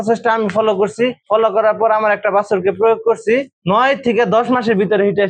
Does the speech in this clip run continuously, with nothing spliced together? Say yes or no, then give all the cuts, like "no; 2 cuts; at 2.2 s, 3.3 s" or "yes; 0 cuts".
no; 1 cut; at 3.5 s